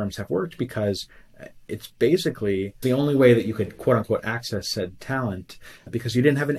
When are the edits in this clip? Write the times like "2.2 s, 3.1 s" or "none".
2.8 s, 5.9 s